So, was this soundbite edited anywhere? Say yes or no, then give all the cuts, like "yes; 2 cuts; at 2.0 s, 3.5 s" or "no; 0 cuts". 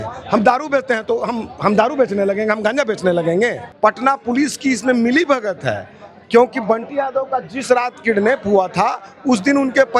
yes; 1 cut; at 3.6 s